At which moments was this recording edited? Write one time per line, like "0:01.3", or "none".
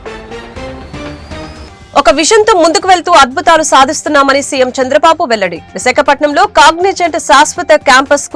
0:01.6